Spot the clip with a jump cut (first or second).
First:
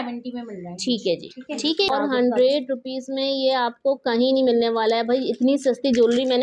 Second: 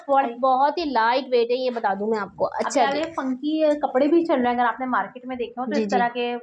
first